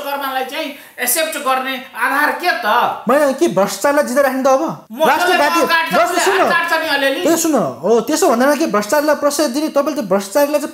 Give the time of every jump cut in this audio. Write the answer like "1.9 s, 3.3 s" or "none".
4.8 s